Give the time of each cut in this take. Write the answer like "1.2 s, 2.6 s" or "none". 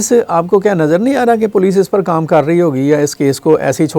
none